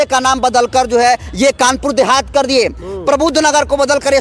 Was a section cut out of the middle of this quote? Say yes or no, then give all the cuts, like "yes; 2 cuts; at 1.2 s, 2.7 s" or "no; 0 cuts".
no; 0 cuts